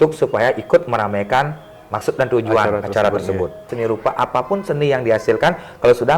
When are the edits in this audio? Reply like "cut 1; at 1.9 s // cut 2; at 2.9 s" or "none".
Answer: cut 1; at 3.7 s

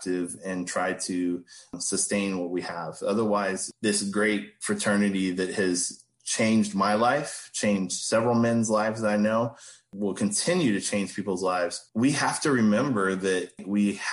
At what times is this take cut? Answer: cut 1; at 4.5 s // cut 2; at 11.8 s

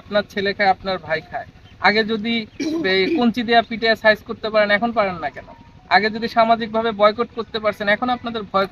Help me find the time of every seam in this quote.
none

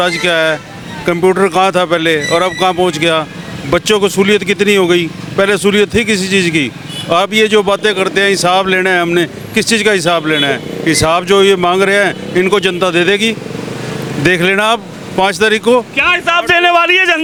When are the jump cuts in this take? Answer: none

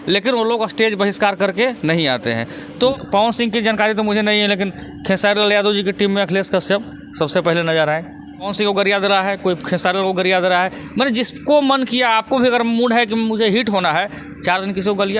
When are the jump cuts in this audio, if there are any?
cut 1; at 2.9 s // cut 2; at 8.5 s

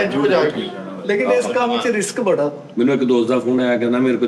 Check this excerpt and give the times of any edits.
cut 1; at 2.6 s

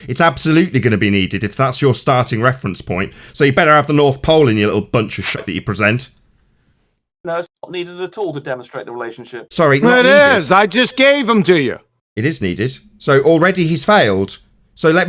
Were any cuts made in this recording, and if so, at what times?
cut 1; at 5.4 s

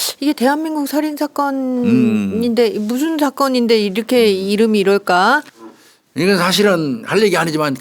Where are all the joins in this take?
cut 1; at 5.6 s

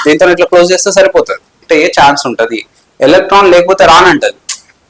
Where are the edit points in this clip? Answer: cut 1; at 1.6 s

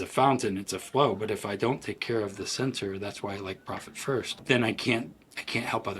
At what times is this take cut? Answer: cut 1; at 4.4 s

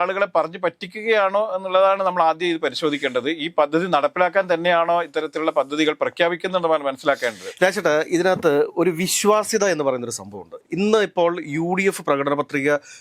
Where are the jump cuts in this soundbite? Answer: none

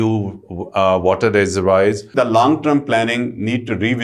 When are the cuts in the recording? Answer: cut 1; at 2.1 s

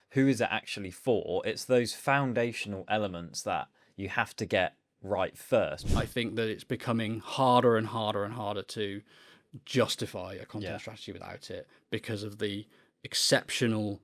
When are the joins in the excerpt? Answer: cut 1; at 5.8 s

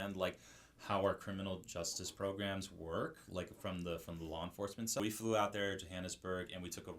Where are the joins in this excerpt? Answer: cut 1; at 5.0 s

